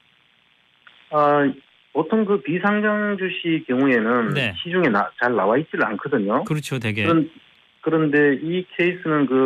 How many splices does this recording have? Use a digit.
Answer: 0